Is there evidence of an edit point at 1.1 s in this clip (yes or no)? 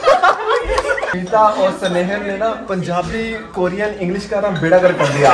yes